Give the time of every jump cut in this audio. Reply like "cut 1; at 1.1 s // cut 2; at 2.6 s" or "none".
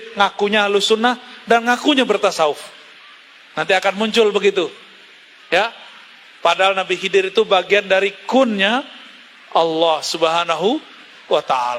none